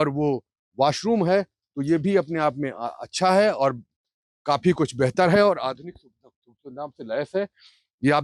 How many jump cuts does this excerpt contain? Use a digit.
0